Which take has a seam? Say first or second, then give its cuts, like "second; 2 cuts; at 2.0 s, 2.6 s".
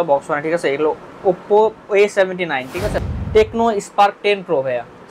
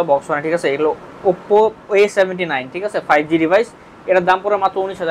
first; 1 cut; at 3.0 s